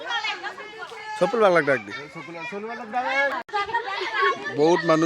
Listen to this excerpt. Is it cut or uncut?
cut